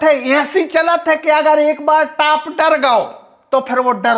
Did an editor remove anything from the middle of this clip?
no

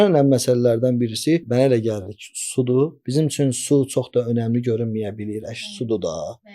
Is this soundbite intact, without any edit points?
no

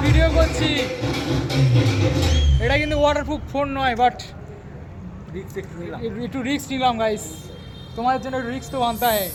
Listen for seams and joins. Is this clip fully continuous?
yes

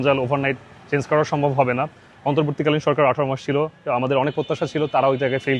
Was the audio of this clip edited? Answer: no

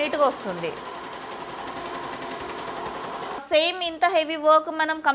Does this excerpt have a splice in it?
yes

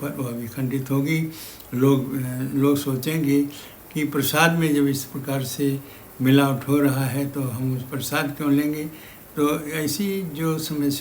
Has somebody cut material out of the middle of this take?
no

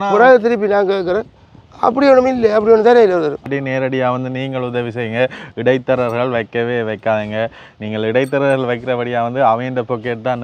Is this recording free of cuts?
no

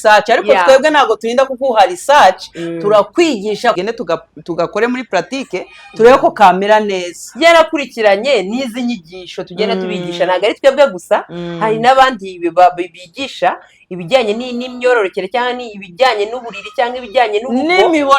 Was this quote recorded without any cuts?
no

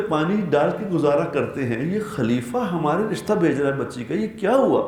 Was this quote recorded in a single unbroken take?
yes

